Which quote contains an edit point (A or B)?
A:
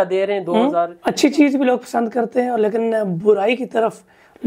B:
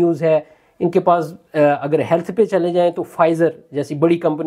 A